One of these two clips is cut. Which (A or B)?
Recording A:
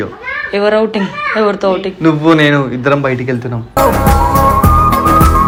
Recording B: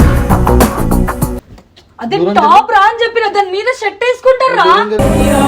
B